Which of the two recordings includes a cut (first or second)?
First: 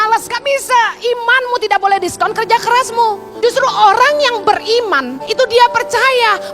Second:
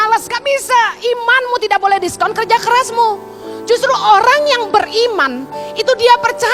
first